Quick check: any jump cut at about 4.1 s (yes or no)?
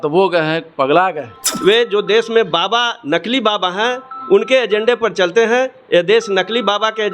no